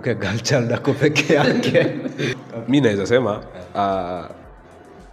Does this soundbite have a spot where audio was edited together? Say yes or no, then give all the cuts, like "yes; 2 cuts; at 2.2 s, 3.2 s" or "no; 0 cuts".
yes; 1 cut; at 2.4 s